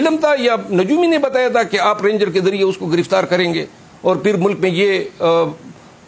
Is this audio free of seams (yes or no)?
yes